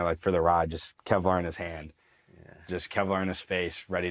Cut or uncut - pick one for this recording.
uncut